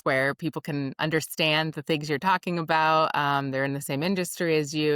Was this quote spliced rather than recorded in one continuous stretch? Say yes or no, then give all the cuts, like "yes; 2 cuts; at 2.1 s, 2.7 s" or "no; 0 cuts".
no; 0 cuts